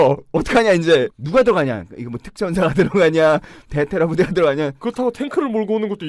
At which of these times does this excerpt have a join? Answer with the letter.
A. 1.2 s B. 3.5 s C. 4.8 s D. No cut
A